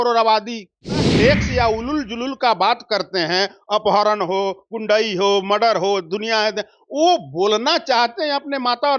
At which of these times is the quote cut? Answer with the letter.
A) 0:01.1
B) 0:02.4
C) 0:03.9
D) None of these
A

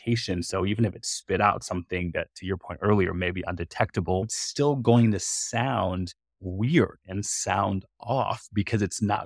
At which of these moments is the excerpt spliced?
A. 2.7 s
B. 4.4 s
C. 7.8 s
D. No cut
B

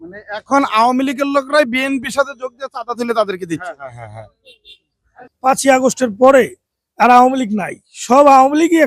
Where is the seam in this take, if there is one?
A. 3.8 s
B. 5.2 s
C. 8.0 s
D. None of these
B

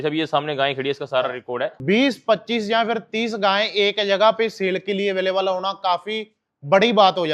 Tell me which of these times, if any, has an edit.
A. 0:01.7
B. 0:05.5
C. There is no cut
A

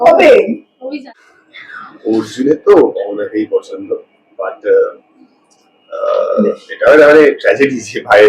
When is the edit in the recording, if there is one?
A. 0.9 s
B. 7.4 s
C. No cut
A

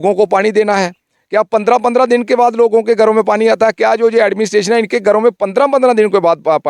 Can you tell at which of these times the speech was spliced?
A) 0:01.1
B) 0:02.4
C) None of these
C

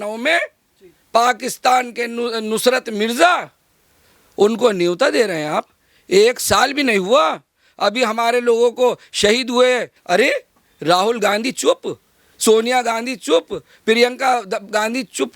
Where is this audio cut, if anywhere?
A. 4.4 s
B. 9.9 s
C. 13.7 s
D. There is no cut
B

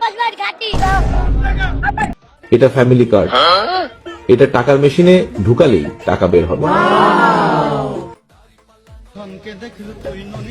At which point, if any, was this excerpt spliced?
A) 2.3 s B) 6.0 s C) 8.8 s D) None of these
A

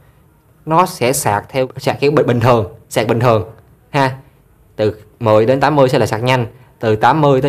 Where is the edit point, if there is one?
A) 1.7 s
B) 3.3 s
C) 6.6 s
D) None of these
A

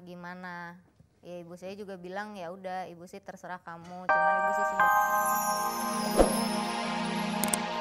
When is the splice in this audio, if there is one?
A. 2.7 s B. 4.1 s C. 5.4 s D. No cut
B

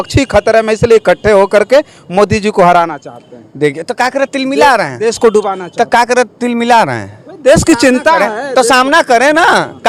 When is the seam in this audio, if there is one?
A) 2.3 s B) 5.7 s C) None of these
C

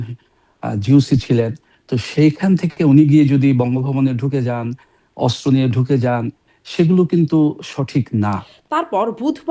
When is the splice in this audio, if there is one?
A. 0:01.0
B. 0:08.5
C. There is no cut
B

